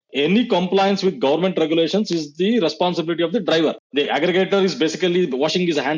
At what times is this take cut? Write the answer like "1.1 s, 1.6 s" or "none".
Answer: none